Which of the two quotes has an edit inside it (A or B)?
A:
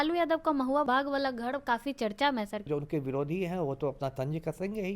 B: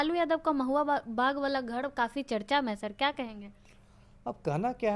A